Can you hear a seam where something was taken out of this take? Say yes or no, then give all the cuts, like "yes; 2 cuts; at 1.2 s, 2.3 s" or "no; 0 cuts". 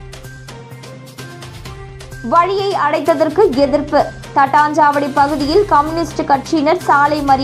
yes; 1 cut; at 1.0 s